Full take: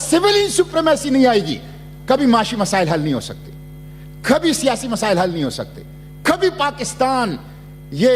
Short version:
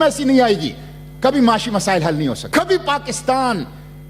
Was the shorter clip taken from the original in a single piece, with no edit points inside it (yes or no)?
no